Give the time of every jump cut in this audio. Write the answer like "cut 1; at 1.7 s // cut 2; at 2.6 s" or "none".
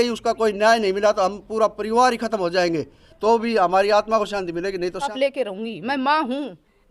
cut 1; at 5.1 s